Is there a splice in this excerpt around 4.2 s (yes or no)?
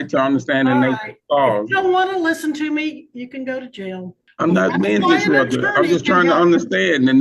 yes